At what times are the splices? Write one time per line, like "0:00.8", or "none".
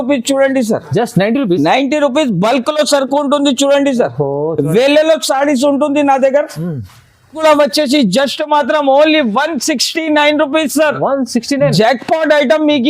0:07.4

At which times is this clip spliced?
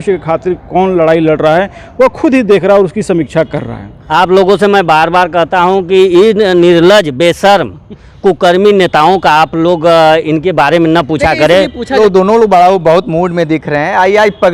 0:03.9
0:11.9

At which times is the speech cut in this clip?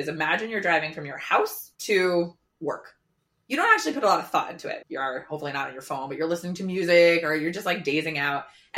0:02.5
0:04.8

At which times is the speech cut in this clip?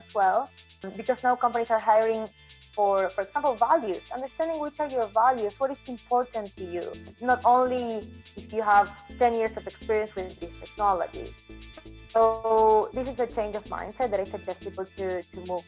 0:00.9
0:07.1

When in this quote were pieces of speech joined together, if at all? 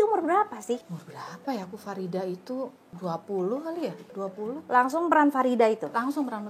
0:01.0
0:02.9

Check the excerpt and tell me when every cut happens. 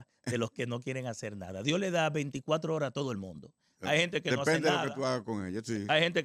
none

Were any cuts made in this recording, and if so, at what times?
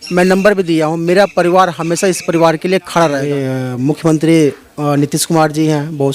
0:03.3

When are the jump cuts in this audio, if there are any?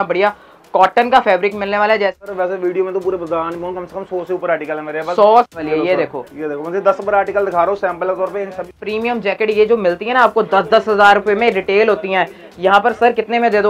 0:02.2
0:05.5
0:08.7

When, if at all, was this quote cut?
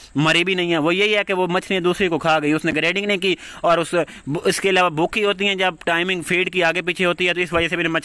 none

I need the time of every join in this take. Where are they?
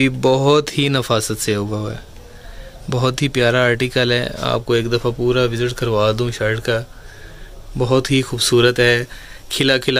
none

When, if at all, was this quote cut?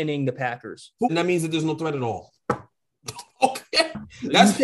0:01.1

